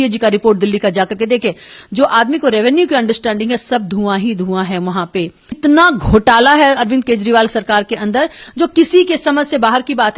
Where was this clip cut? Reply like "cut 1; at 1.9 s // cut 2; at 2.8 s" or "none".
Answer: cut 1; at 5.6 s